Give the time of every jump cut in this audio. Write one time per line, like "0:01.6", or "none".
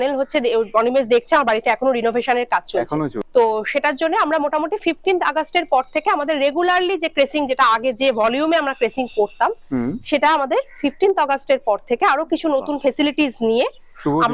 0:03.2